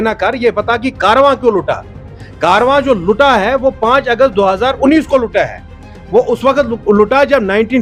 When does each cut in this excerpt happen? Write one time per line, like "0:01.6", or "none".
none